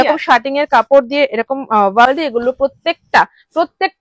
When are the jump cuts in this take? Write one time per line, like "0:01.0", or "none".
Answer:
0:02.1